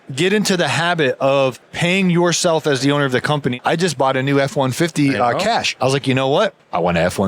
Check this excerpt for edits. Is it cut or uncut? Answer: cut